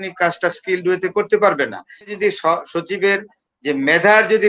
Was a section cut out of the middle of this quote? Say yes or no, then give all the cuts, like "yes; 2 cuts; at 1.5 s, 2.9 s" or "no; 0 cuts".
yes; 1 cut; at 2.1 s